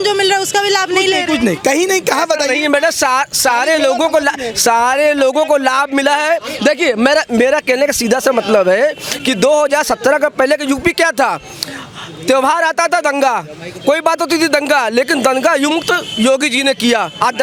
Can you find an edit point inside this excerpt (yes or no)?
no